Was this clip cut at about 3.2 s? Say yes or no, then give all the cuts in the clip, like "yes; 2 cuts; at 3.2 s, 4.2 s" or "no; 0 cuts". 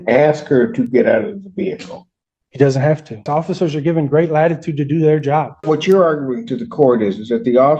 yes; 2 cuts; at 3.2 s, 5.6 s